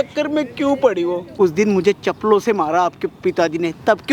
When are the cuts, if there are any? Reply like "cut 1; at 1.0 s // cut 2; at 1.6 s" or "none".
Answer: cut 1; at 1.3 s